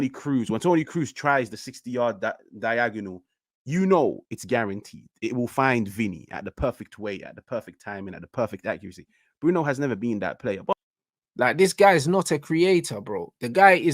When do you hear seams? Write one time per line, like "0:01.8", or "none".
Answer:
0:10.7